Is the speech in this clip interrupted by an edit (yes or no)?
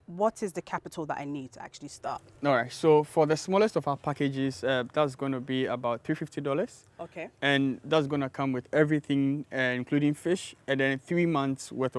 no